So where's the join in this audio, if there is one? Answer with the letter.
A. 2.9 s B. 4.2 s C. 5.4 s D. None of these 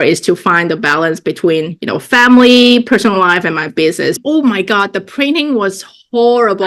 B